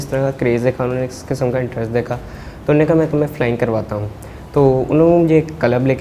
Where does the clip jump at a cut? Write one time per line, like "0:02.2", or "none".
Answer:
none